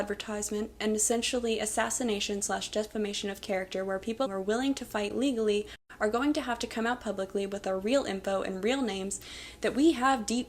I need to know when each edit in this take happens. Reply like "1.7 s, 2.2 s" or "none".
4.3 s